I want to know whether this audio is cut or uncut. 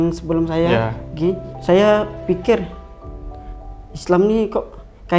cut